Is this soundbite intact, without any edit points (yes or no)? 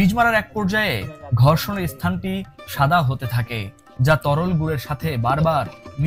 yes